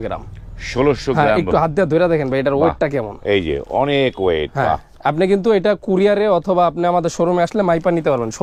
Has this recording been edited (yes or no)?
no